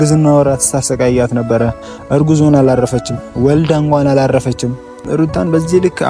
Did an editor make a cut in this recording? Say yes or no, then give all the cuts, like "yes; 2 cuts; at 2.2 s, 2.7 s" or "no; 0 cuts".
yes; 1 cut; at 5.0 s